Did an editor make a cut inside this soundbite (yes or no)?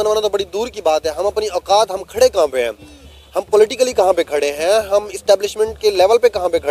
no